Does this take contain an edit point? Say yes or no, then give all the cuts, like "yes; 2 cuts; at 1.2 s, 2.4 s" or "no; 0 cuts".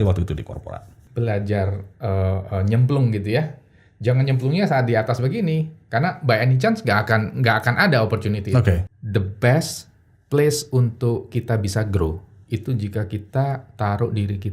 yes; 2 cuts; at 1.0 s, 8.9 s